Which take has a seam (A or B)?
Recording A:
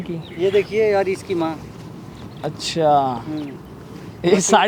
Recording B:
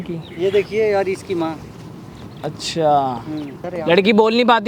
B